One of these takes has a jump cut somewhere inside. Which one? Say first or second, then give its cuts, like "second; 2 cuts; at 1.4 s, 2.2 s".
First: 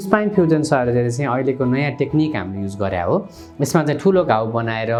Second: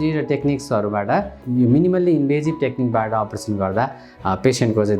second; 1 cut; at 1.4 s